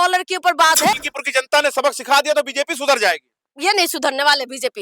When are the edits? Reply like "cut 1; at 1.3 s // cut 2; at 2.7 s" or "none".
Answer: cut 1; at 0.9 s // cut 2; at 3.5 s